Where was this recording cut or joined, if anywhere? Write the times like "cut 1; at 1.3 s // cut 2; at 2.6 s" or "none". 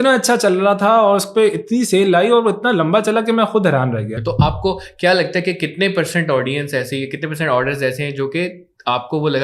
cut 1; at 4.1 s